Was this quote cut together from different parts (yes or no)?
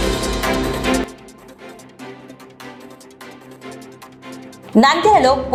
no